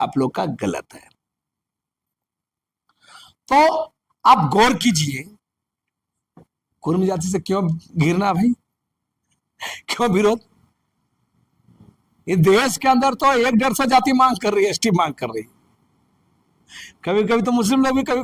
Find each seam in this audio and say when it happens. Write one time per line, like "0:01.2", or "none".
none